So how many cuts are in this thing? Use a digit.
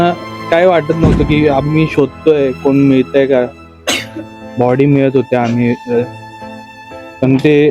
0